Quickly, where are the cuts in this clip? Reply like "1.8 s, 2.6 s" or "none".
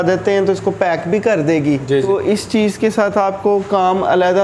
2.0 s